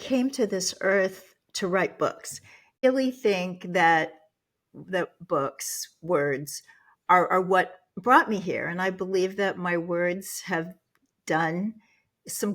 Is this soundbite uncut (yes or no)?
no